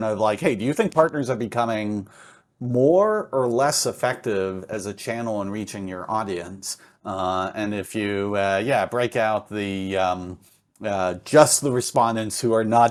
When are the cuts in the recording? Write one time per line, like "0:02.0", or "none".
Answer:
none